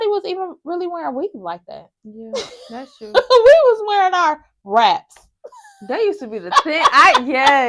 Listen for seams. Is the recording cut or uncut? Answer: uncut